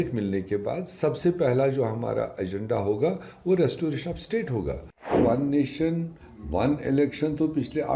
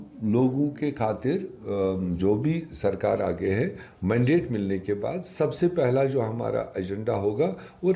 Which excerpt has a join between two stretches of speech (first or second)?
first